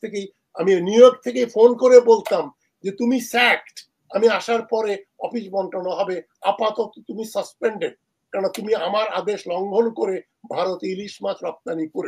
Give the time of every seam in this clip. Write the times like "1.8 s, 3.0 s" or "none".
none